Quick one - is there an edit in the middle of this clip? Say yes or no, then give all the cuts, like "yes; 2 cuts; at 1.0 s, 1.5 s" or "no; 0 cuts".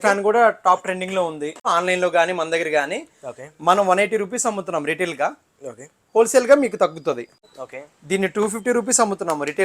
yes; 2 cuts; at 1.7 s, 7.4 s